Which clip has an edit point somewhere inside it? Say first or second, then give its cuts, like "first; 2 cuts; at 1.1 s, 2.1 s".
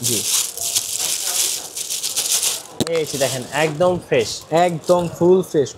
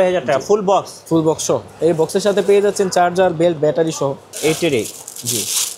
second; 1 cut; at 4.3 s